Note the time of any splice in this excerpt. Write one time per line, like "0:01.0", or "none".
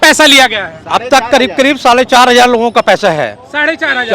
none